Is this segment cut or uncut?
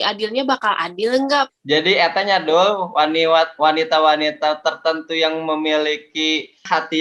cut